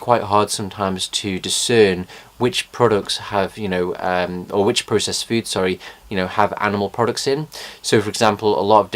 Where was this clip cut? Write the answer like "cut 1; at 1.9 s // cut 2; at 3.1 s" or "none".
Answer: cut 1; at 1.5 s